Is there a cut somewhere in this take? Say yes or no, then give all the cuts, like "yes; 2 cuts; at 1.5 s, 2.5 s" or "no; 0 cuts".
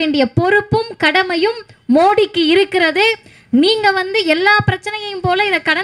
no; 0 cuts